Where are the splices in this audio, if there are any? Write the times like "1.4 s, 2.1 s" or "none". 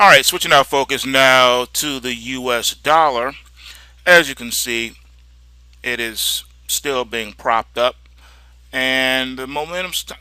none